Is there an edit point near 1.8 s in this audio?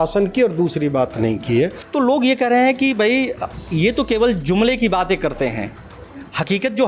yes; 1 cut; at 1.8 s

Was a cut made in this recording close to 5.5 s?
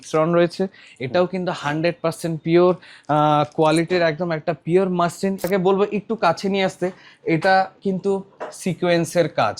yes; 1 cut; at 5.5 s

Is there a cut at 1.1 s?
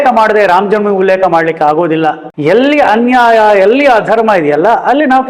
no; 1 cut; at 2.3 s

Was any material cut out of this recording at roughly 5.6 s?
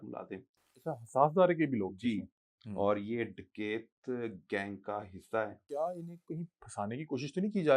yes; 1 cut; at 5.6 s

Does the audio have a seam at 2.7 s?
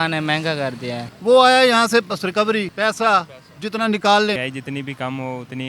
yes; 3 cuts; at 1.1 s, 2.7 s, 4.4 s

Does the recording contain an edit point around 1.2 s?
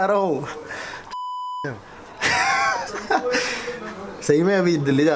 no; 0 cuts

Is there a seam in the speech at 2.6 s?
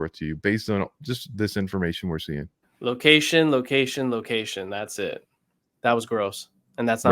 no; 1 cut; at 5.6 s

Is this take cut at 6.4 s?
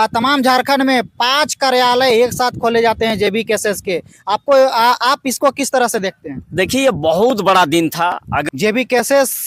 no; 1 cut; at 8.4 s

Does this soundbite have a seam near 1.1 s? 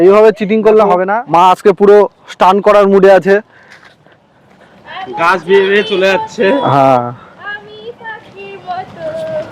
yes; 1 cut; at 1.1 s

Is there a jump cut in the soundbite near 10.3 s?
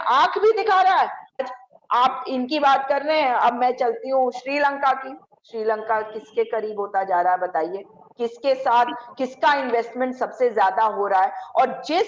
no; 1 cut; at 1.4 s

